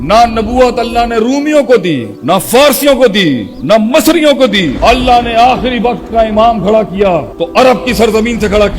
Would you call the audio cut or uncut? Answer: cut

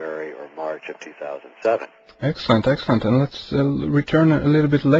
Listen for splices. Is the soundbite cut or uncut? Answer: uncut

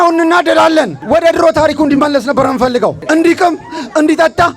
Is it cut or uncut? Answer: cut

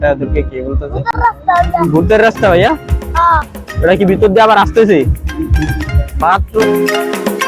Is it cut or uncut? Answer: uncut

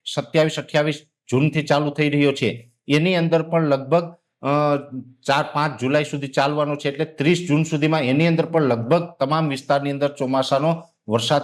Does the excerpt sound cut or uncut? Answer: uncut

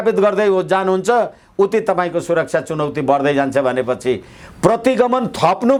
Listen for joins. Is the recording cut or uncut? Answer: uncut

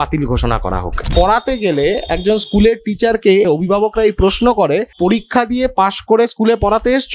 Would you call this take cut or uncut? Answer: cut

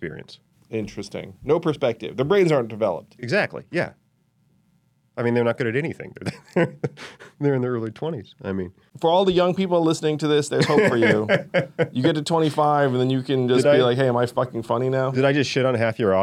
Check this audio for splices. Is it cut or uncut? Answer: uncut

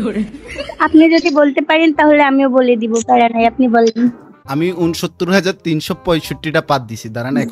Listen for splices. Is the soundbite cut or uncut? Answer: uncut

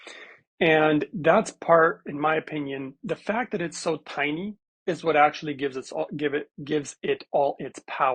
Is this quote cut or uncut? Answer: cut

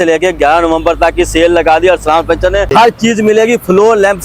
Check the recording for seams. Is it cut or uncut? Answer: cut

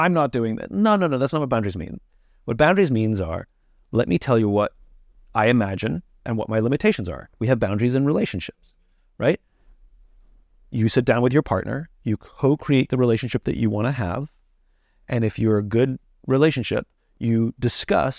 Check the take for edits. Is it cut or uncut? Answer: uncut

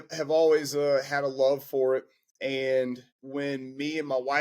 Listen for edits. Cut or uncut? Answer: cut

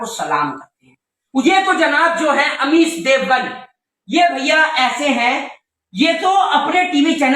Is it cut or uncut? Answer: cut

